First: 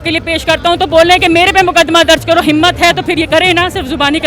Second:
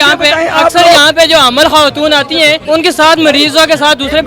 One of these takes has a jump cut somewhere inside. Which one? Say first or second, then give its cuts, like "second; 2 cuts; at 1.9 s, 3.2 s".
second; 1 cut; at 2.6 s